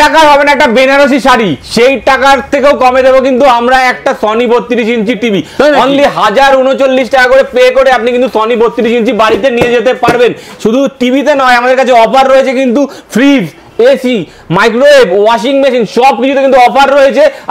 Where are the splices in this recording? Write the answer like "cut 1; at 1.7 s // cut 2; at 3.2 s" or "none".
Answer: none